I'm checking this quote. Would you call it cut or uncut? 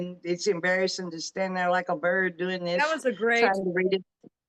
uncut